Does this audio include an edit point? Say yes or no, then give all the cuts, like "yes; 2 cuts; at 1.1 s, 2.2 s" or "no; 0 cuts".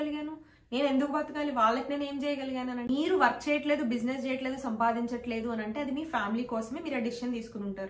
yes; 1 cut; at 2.8 s